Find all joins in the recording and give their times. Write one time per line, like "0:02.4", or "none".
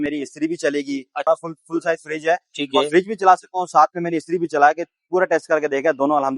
0:01.3